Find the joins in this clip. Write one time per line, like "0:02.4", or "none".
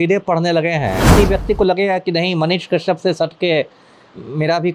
0:01.1